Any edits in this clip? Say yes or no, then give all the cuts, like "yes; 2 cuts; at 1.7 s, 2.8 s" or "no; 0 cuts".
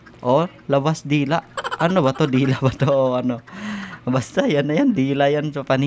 no; 0 cuts